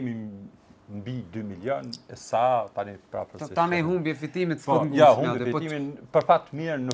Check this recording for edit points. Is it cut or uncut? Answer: uncut